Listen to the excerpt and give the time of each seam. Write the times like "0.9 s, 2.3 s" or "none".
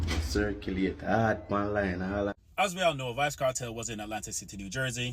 2.3 s